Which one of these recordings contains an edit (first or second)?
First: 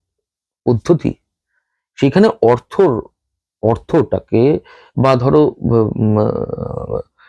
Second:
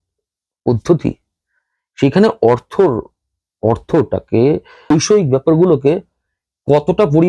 second